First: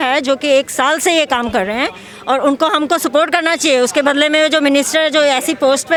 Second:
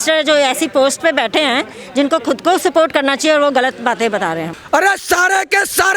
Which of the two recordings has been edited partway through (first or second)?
second